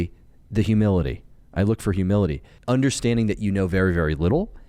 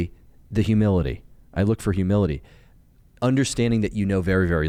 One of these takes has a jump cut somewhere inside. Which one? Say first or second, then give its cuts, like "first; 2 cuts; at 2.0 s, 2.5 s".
first; 1 cut; at 2.5 s